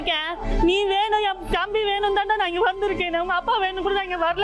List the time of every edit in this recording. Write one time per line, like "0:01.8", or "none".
none